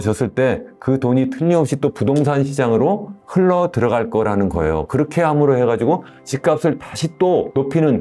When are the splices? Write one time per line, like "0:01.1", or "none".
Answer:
none